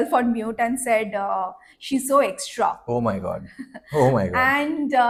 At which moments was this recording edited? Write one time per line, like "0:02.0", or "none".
none